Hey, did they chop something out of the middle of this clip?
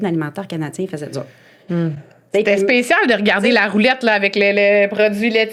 no; 0 cuts

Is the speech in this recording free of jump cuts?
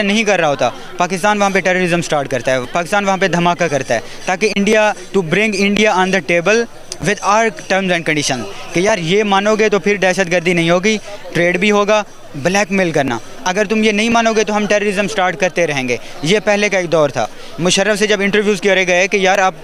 yes; 0 cuts

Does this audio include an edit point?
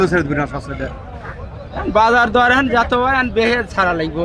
no; 0 cuts

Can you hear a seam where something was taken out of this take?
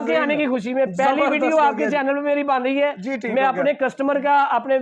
no; 0 cuts

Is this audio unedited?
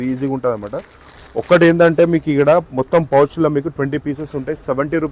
yes; 0 cuts

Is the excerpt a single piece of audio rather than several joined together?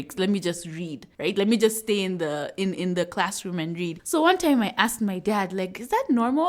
yes; 0 cuts

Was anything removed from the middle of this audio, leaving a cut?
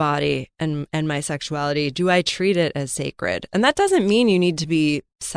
no; 0 cuts

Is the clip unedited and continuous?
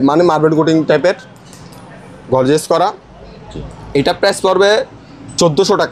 yes; 0 cuts

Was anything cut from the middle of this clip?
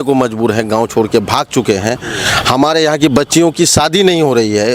no; 0 cuts

